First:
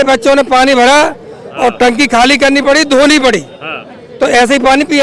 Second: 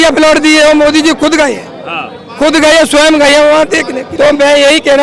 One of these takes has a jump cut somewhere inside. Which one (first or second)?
second